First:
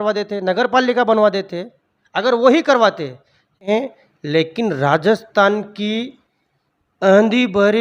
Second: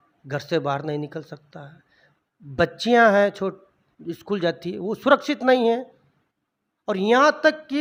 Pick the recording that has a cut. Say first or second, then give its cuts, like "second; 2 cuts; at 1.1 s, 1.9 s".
first; 1 cut; at 3.7 s